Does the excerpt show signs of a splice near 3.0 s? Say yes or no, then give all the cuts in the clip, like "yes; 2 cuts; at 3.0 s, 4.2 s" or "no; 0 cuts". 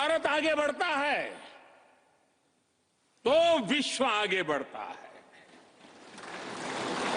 no; 0 cuts